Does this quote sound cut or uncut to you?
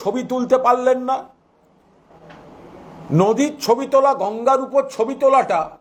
uncut